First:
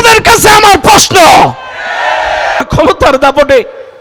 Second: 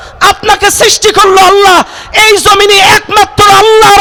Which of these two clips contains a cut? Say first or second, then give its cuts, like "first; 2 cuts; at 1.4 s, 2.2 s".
first; 1 cut; at 2.6 s